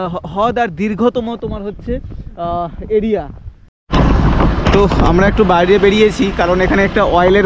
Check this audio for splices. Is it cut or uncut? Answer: cut